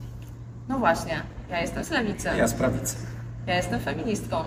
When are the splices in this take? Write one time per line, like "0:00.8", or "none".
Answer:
none